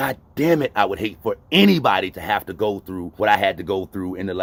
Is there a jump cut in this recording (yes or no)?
no